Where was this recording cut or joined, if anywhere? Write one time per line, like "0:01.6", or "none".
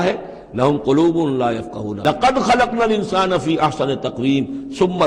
0:02.0